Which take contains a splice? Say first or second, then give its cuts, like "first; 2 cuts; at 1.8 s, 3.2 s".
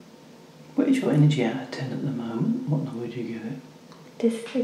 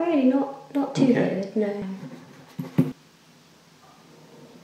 second; 1 cut; at 3.1 s